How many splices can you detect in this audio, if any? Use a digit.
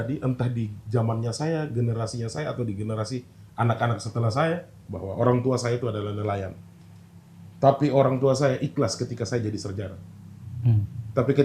1